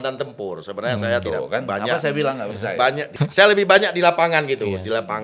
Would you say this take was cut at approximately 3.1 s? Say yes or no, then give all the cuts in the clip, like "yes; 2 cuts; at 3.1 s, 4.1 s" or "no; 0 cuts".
yes; 1 cut; at 3.1 s